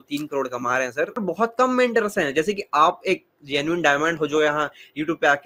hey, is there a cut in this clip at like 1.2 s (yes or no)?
yes